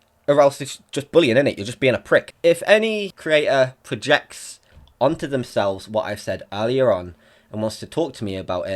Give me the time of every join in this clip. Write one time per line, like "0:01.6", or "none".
0:02.3
0:03.1